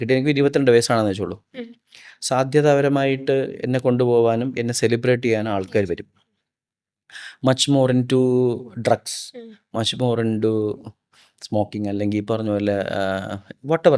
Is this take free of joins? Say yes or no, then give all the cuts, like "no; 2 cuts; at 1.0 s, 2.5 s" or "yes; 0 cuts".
yes; 0 cuts